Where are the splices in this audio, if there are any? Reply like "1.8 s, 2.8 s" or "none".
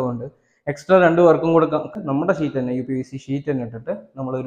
1.9 s